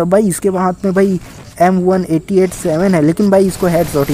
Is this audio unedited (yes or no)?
no